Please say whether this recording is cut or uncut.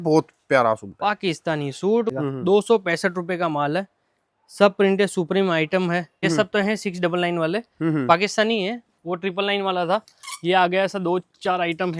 cut